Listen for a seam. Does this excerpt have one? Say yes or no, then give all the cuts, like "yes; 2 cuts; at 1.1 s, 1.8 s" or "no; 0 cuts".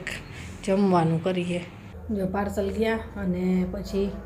no; 0 cuts